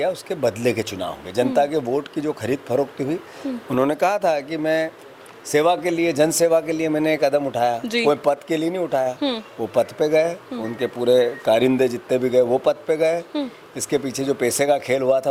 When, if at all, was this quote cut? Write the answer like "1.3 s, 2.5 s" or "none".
none